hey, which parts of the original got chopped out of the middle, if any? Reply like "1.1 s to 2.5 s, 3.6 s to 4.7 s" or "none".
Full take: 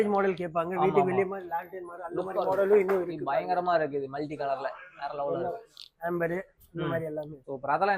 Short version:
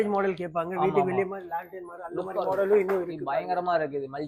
none